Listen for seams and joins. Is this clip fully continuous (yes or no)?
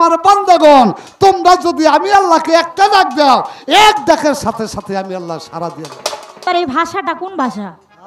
no